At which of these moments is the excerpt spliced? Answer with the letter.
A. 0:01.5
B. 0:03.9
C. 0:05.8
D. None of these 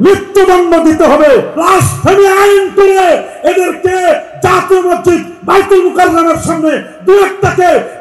A